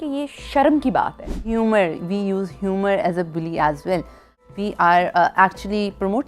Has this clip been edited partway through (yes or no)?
yes